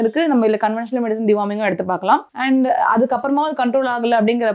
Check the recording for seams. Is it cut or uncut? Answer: uncut